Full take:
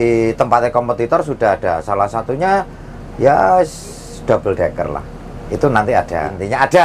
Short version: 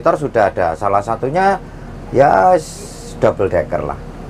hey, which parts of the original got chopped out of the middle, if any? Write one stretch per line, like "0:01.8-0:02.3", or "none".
none